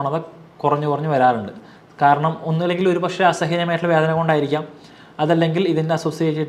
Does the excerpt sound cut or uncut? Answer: uncut